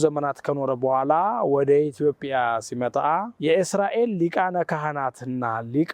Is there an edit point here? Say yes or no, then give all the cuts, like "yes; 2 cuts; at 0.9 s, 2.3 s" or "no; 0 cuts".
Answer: yes; 1 cut; at 3.3 s